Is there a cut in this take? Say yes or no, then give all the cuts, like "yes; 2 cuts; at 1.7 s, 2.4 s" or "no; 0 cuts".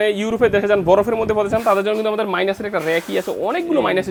no; 0 cuts